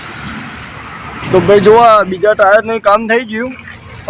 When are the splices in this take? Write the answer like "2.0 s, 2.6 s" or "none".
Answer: 1.2 s